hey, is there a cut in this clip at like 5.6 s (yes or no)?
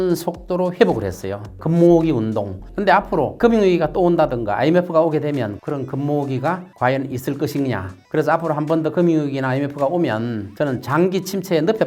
yes